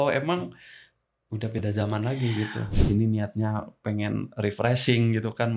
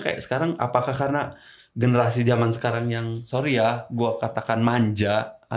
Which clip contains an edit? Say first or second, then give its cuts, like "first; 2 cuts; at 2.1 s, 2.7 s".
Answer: first; 1 cut; at 2.7 s